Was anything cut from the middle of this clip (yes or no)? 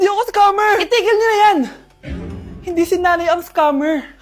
no